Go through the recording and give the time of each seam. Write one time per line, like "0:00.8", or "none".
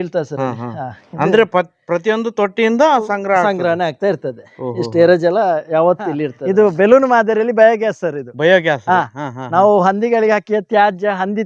0:06.3